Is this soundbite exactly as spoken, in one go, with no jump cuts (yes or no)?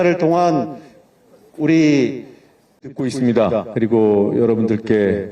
no